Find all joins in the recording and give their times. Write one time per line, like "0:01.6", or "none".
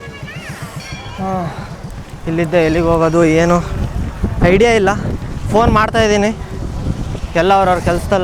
none